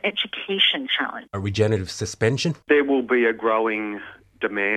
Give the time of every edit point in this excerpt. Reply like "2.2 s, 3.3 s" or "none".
1.2 s